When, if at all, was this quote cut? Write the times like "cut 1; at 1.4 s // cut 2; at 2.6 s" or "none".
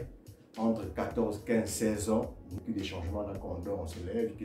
cut 1; at 2.4 s